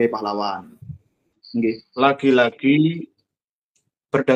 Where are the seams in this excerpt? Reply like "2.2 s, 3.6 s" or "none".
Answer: 1.3 s